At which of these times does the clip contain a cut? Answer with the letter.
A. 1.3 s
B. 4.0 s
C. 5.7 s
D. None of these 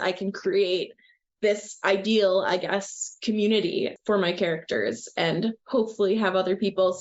D